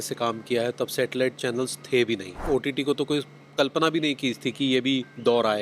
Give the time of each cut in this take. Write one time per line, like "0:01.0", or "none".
0:02.4